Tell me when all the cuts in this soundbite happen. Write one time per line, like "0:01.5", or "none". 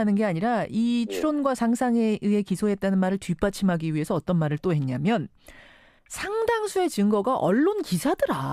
none